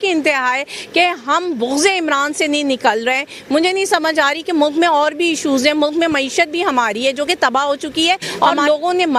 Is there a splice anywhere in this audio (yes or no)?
yes